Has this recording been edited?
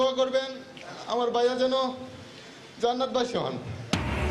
no; 0 cuts

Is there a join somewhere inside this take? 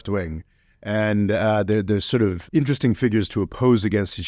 yes; 1 cut; at 2.4 s

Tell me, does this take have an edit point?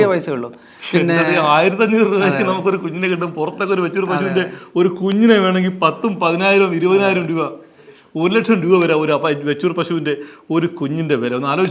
no; 0 cuts

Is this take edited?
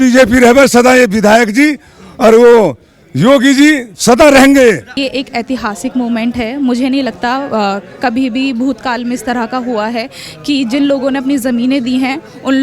yes; 1 cut; at 4.9 s

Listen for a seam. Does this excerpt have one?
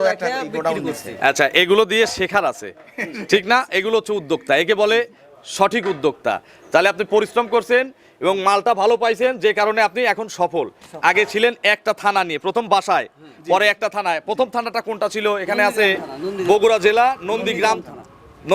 no; 0 cuts

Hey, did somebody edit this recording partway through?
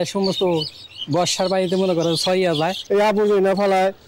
yes; 1 cut; at 2.8 s

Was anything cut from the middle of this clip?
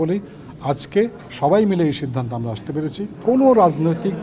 yes; 1 cut; at 3.1 s

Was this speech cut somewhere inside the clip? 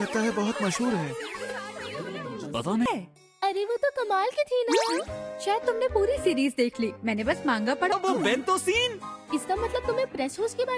yes; 2 cuts; at 2.9 s, 7.9 s

